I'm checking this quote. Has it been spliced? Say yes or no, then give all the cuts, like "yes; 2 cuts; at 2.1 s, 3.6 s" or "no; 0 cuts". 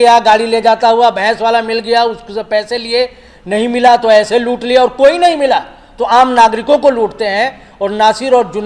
no; 0 cuts